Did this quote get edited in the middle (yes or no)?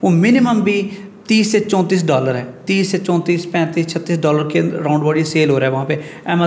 no